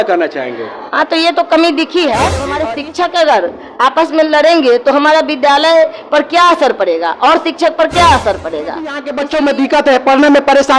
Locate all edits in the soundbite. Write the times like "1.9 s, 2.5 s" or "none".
2.5 s, 9.1 s